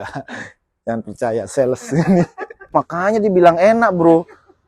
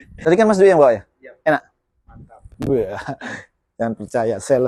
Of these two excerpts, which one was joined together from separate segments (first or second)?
first